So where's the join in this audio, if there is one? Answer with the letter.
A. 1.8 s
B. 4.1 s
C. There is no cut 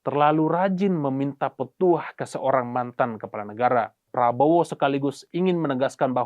B